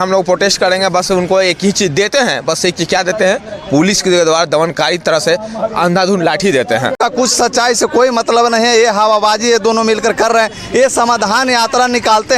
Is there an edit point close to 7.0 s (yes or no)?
yes